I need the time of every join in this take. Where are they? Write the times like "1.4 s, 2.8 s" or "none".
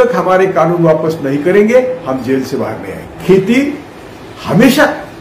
3.2 s

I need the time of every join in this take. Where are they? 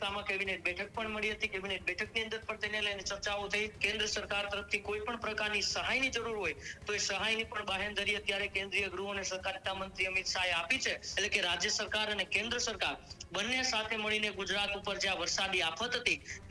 3.8 s, 11.1 s

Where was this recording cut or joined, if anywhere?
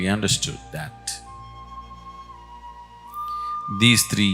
none

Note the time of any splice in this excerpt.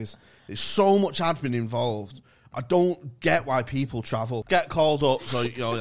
4.4 s

